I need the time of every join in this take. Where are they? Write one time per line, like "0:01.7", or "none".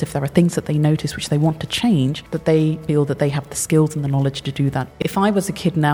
0:02.7
0:05.0